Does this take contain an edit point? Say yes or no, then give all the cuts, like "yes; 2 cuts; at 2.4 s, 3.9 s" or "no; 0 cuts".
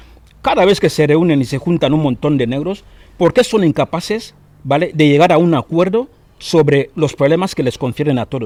no; 0 cuts